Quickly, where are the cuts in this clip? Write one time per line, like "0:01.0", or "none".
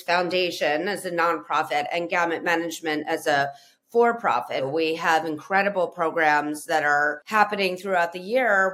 0:04.7
0:07.2